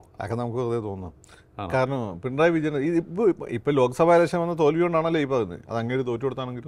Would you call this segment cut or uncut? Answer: uncut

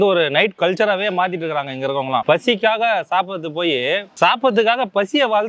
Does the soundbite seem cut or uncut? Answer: uncut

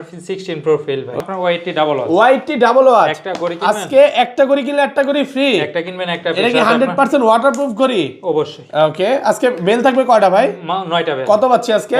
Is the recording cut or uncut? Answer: cut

